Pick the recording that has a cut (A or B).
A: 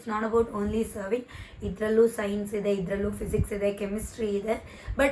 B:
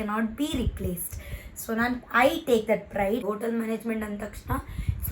B